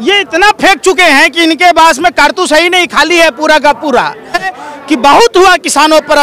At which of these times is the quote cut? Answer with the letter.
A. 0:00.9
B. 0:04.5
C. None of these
B